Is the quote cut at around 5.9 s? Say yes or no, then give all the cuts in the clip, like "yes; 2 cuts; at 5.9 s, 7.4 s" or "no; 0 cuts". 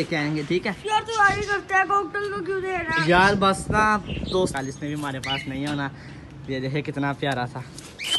no; 1 cut; at 4.5 s